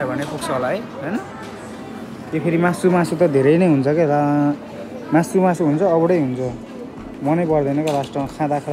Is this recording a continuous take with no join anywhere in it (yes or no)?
yes